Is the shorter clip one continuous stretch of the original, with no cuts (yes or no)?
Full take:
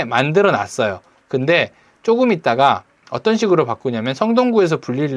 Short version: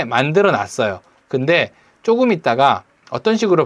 yes